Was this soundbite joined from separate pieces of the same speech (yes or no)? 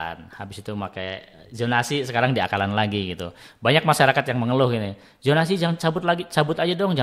no